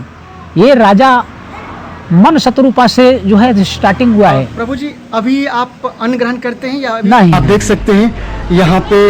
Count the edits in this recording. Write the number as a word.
two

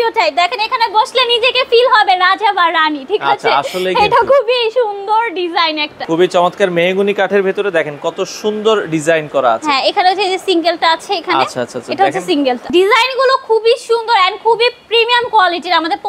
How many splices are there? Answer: two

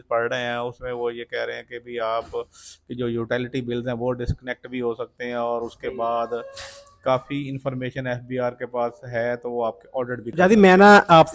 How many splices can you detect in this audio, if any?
one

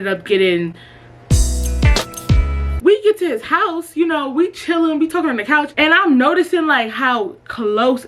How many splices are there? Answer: one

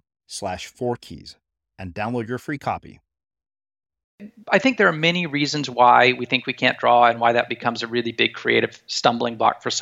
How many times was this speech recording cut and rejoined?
one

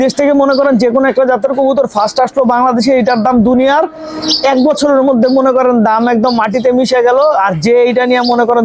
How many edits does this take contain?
zero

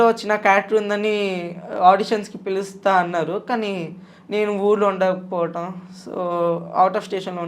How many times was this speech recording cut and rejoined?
zero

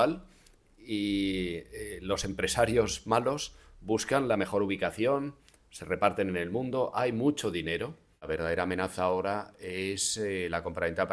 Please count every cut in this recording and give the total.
one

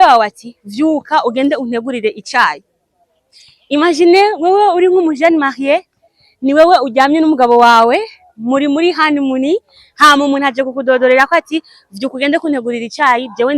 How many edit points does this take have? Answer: zero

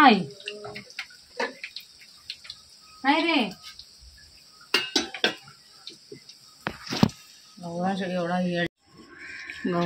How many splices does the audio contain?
one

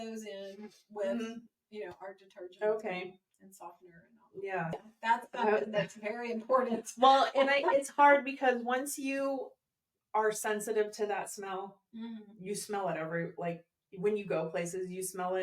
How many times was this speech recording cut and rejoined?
one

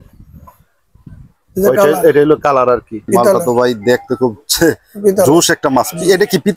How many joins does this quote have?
one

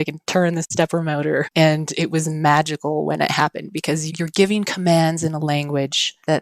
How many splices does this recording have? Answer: one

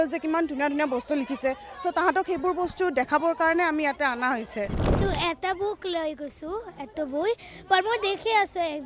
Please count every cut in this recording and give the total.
one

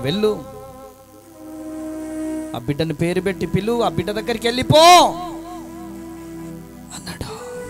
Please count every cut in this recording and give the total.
zero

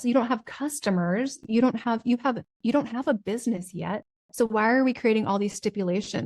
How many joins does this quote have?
one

